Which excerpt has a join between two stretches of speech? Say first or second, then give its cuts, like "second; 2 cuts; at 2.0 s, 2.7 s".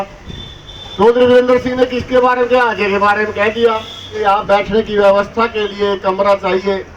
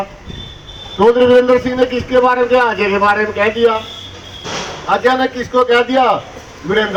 first; 1 cut; at 4.2 s